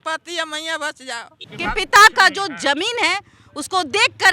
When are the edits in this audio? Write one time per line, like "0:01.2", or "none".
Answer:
0:01.4